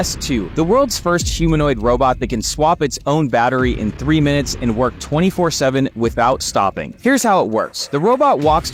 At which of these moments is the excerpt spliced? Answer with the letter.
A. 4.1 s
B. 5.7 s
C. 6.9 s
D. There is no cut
D